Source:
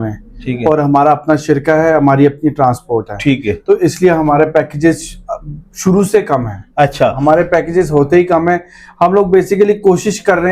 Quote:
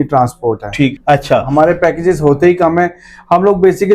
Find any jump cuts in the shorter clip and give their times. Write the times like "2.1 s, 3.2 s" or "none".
1.0 s